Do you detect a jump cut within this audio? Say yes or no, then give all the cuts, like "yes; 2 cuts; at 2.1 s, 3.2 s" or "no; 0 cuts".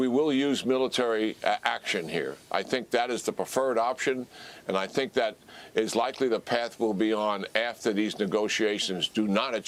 no; 0 cuts